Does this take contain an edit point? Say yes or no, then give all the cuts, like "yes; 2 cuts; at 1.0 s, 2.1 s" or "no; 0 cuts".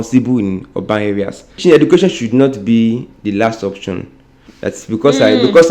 yes; 1 cut; at 1.6 s